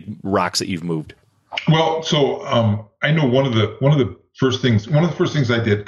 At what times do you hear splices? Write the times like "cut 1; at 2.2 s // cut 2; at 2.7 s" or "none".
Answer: none